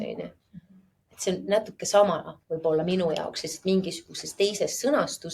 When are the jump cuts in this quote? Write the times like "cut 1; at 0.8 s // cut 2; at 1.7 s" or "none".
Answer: none